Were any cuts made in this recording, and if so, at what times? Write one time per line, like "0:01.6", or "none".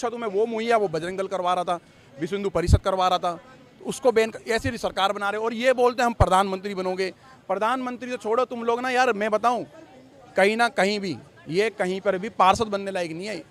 none